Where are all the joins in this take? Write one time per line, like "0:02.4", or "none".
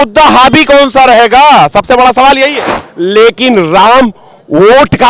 0:02.8